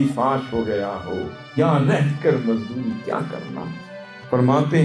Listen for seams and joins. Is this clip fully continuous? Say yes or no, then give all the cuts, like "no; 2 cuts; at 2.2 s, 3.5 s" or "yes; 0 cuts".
yes; 0 cuts